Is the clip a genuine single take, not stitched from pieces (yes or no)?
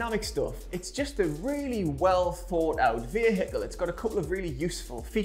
yes